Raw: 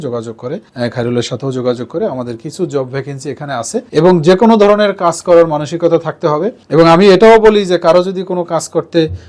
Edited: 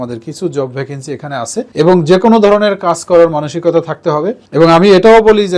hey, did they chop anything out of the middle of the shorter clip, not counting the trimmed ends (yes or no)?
no